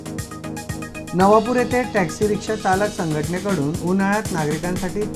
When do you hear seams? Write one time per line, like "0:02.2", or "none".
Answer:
none